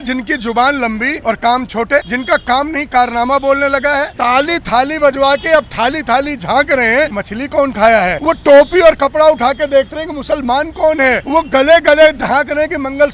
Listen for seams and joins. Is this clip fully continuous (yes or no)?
no